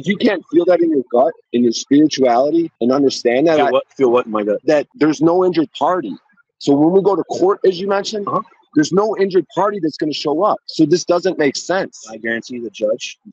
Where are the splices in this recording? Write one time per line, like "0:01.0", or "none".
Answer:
0:01.4
0:02.7
0:04.7